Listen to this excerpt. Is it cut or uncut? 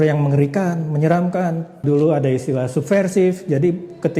cut